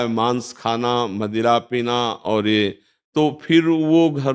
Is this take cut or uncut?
uncut